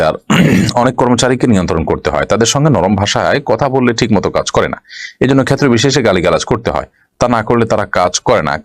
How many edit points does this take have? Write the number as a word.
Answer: zero